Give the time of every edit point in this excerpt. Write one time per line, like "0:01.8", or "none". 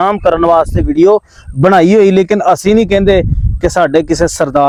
none